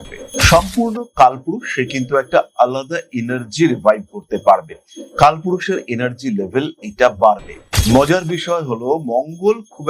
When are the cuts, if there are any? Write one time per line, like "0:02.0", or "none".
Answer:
0:07.7